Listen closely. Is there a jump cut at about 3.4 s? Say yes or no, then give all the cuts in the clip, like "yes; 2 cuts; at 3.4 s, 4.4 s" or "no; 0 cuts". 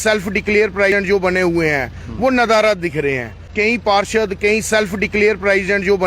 yes; 2 cuts; at 0.9 s, 3.4 s